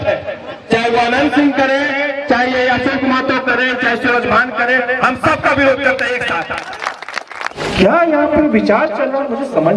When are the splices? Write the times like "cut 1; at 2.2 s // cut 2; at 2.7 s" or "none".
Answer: cut 1; at 7.6 s